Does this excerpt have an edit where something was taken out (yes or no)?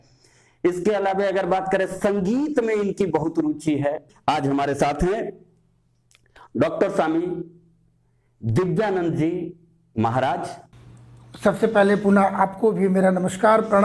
no